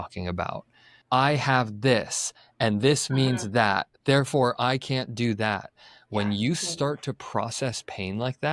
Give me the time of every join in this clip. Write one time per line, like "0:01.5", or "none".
0:00.9

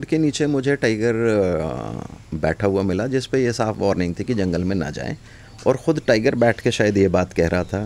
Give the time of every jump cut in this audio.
none

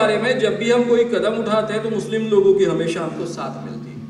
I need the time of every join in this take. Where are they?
none

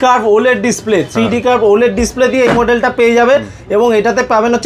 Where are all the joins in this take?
none

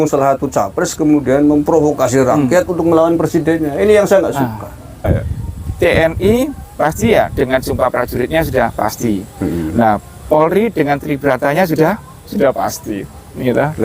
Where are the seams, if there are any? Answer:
0:05.1

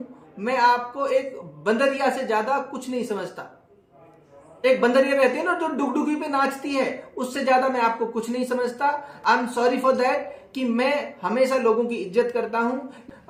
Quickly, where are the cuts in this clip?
none

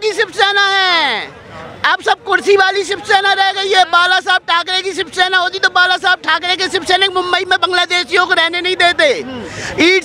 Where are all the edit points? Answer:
none

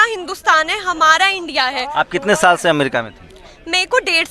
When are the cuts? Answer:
none

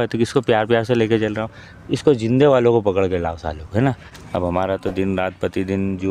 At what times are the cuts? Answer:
0:04.1

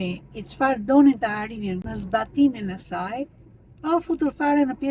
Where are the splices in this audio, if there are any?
0:01.9

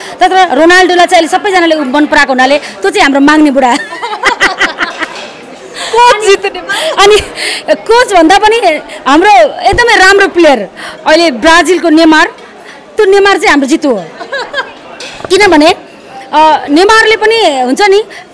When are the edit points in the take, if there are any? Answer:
none

